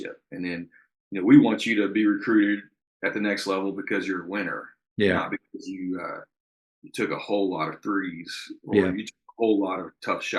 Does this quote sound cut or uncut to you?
uncut